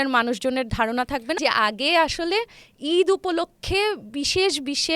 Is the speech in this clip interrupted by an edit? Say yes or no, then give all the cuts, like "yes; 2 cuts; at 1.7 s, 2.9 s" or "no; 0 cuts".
yes; 1 cut; at 1.4 s